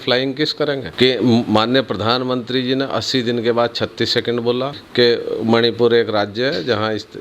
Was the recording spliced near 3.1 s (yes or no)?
no